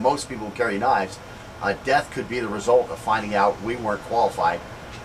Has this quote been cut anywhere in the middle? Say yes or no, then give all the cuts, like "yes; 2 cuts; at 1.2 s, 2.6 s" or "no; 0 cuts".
yes; 1 cut; at 1.9 s